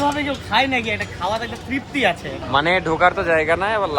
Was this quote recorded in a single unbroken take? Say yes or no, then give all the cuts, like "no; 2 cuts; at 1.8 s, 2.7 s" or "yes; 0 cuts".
no; 1 cut; at 2.4 s